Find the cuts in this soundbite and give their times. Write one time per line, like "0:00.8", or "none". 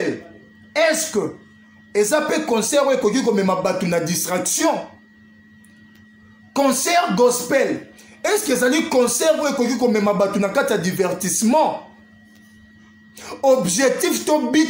none